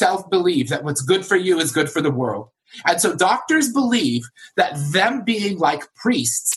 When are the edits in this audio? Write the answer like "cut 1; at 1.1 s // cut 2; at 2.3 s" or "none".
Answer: none